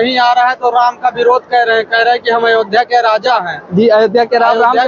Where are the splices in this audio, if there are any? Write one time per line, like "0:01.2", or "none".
none